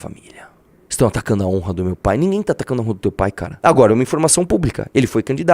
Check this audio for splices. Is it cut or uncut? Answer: cut